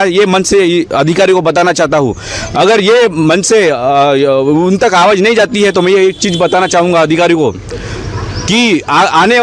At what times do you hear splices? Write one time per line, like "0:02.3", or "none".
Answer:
none